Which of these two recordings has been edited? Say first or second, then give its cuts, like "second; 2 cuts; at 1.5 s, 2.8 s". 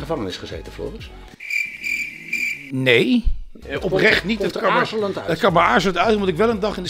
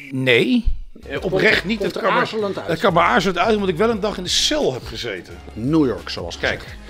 second; 1 cut; at 5.5 s